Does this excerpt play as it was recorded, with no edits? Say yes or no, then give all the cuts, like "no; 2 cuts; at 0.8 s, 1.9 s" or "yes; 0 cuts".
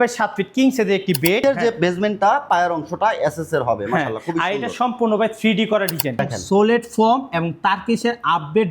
no; 2 cuts; at 1.4 s, 6.2 s